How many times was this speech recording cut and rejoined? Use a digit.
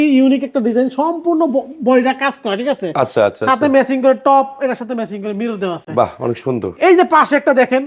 0